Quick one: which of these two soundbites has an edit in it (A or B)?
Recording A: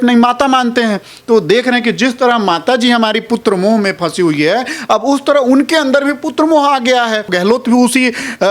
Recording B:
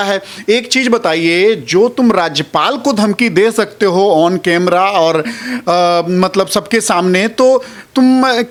A